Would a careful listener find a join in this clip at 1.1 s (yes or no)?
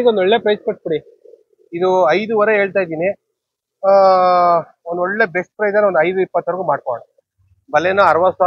no